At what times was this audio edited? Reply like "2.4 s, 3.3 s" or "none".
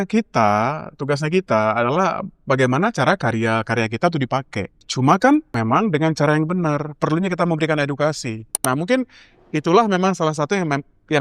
4.8 s, 5.5 s, 8.5 s